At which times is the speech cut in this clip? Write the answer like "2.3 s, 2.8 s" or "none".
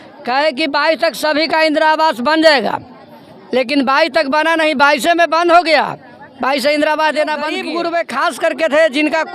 7.6 s